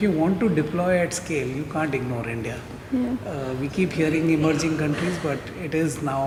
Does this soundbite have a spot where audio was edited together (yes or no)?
no